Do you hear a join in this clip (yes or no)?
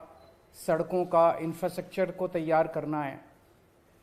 no